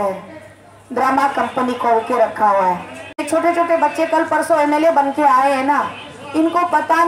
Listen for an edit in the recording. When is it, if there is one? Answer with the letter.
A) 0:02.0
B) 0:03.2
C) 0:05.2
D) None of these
B